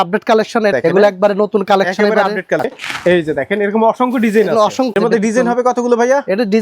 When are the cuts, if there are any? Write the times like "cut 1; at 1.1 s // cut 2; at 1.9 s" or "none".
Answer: cut 1; at 0.7 s // cut 2; at 2.7 s // cut 3; at 5.0 s